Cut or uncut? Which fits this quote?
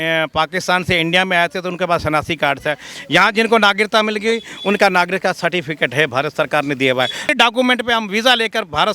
cut